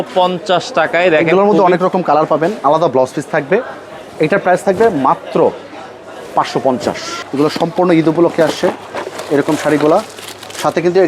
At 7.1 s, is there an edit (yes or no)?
yes